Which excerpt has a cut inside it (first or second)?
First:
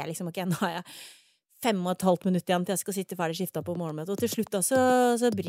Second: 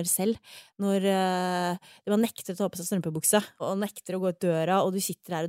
second